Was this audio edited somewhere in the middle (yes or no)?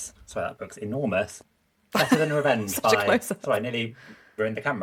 no